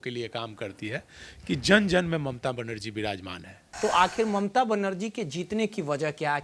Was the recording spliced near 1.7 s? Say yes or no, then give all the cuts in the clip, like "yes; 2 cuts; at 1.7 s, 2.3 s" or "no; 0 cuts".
no; 1 cut; at 3.6 s